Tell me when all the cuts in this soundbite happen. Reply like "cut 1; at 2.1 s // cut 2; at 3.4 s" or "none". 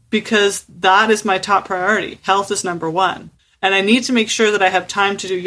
none